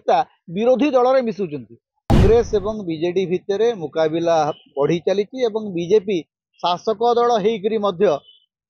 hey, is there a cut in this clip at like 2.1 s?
yes; 1 cut; at 2.1 s

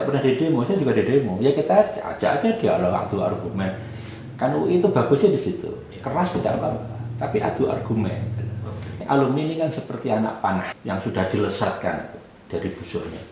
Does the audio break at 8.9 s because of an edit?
yes; 2 cuts; at 8.9 s, 10.7 s

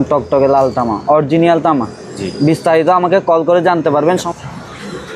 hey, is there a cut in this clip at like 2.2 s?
no; 1 cut; at 4.3 s

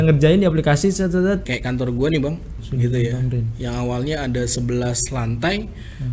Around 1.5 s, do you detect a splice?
yes; 2 cuts; at 1.5 s, 2.6 s

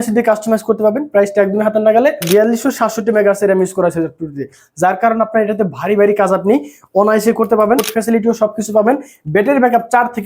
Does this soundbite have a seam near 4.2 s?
no; 2 cuts; at 2.2 s, 7.9 s

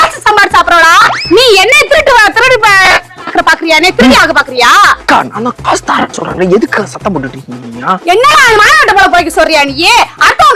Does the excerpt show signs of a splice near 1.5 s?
no; 1 cut; at 8.0 s

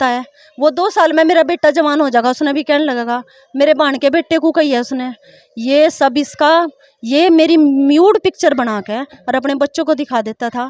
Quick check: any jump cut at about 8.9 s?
no; 0 cuts

